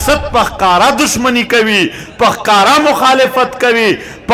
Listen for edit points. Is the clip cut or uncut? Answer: uncut